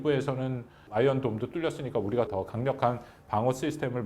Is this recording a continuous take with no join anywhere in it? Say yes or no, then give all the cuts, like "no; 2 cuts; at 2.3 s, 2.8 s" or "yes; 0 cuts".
no; 1 cut; at 2.3 s